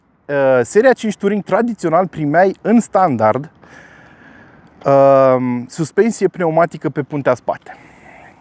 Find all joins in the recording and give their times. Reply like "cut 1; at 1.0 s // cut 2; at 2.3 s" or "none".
none